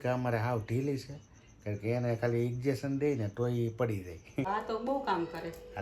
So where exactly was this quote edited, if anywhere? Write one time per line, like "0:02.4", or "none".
0:04.5